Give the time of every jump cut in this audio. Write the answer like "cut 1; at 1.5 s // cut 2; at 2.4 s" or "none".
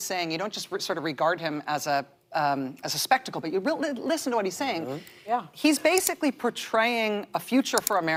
none